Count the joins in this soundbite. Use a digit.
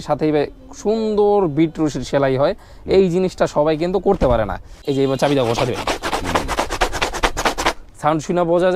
1